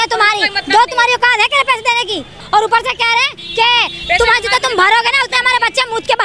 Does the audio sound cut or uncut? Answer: cut